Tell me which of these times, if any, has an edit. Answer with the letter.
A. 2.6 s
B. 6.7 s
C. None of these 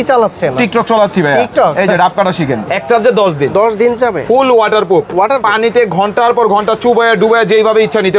A